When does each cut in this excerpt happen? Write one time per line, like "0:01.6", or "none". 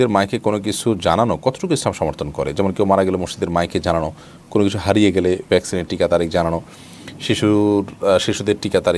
none